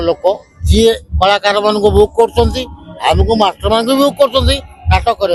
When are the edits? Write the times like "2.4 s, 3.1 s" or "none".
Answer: none